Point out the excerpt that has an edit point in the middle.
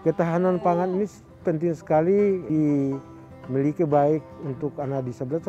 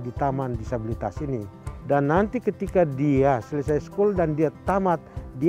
first; 1 cut; at 2.4 s

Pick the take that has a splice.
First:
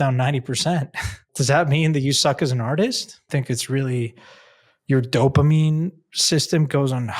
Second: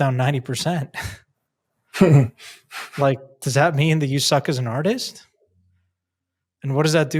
first; 2 cuts; at 1.3 s, 3.3 s

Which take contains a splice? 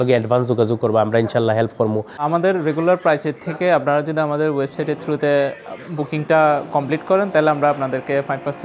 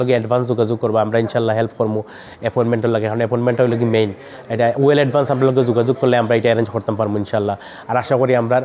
first; 1 cut; at 2.2 s

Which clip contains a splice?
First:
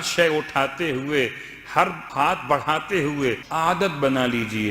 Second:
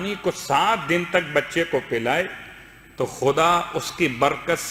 first; 2 cuts; at 2.0 s, 3.5 s

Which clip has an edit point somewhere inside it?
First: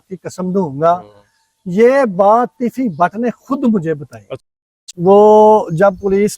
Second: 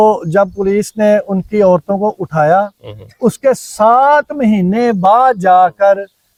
first; 1 cut; at 4.4 s

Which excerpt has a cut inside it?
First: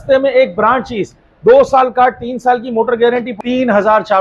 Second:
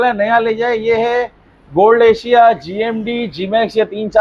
first; 1 cut; at 3.3 s

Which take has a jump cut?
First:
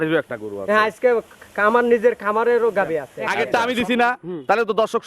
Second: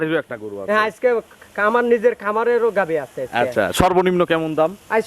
first; 1 cut; at 3.2 s

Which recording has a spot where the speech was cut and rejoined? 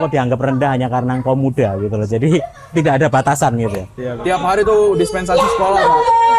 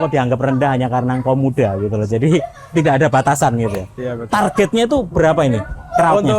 first; 1 cut; at 4.1 s

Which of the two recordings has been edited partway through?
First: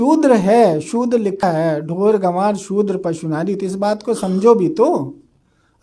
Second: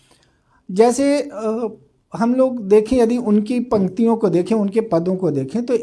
first; 1 cut; at 1.4 s

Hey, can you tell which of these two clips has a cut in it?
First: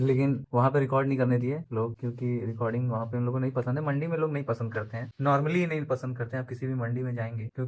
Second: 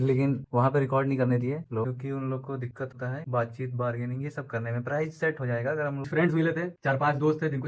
second; 2 cuts; at 1.8 s, 6.0 s

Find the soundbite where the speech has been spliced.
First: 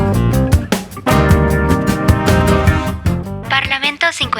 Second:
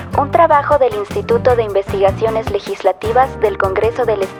first; 1 cut; at 3.4 s

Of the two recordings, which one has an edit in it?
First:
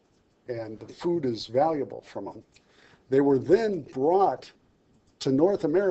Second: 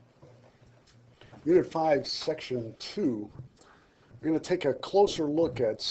first; 1 cut; at 3.2 s

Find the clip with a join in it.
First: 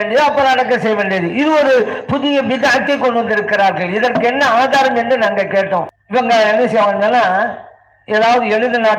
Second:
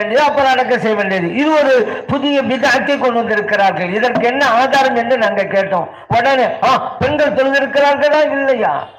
first; 1 cut; at 6.0 s

